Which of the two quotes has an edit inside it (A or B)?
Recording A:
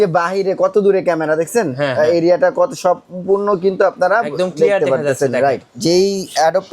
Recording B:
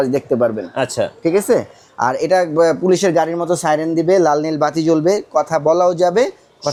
A